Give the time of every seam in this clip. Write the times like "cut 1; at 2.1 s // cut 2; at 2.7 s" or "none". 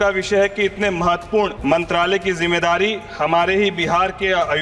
cut 1; at 1.6 s